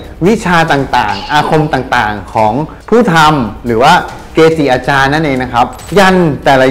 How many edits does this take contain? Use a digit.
1